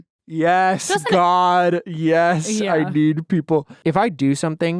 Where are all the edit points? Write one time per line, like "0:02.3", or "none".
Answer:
0:03.7